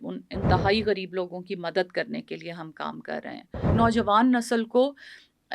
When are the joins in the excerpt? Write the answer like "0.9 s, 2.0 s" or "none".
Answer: 3.7 s